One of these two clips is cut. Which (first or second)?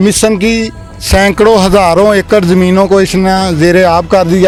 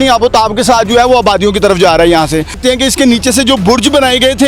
second